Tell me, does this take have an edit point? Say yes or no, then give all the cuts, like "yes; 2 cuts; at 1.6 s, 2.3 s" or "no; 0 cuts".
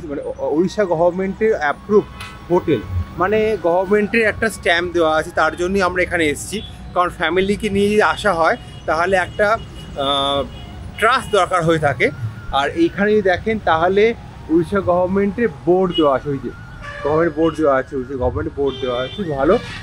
no; 0 cuts